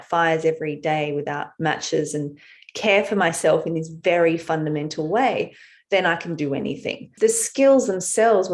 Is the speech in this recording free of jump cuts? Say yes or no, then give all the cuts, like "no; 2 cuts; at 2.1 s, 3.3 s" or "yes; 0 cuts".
no; 1 cut; at 7.1 s